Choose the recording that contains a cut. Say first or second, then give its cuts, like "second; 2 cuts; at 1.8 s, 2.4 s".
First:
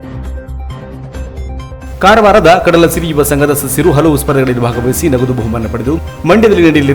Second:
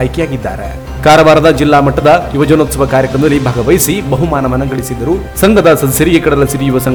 first; 1 cut; at 0.9 s